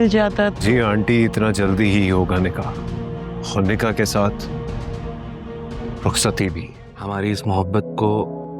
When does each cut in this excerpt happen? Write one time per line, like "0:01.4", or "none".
0:06.7